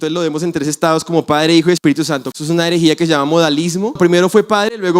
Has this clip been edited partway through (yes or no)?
yes